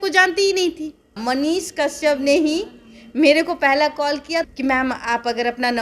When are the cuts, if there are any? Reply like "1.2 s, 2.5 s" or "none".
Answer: 1.2 s, 4.5 s